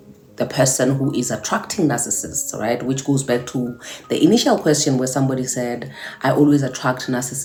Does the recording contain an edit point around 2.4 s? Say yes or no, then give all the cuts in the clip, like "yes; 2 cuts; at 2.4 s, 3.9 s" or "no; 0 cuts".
no; 0 cuts